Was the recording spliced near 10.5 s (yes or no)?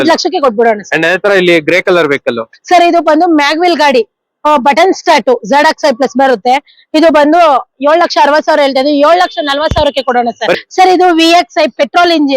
yes